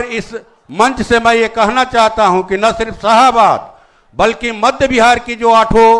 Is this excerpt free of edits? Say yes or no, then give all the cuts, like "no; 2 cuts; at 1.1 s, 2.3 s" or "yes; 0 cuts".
yes; 0 cuts